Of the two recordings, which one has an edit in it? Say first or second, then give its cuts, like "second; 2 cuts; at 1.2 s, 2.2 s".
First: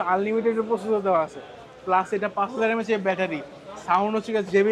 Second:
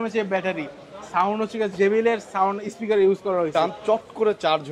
second; 1 cut; at 3.5 s